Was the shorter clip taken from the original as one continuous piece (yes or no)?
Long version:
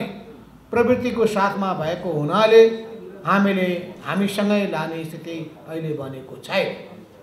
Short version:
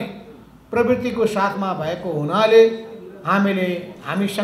yes